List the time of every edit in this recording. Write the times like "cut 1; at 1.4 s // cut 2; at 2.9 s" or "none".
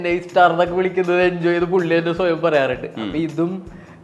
none